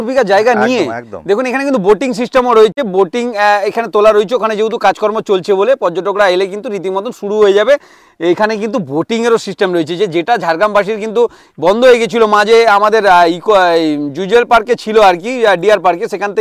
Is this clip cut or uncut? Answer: uncut